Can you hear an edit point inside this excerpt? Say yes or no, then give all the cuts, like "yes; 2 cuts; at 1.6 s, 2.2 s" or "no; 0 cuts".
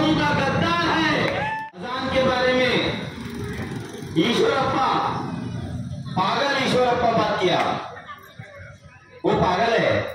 yes; 1 cut; at 1.5 s